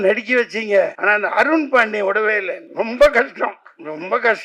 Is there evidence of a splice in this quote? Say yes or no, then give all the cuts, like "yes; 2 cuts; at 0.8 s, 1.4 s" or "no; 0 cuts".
yes; 2 cuts; at 1.0 s, 2.6 s